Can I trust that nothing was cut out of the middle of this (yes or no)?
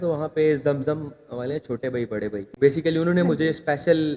no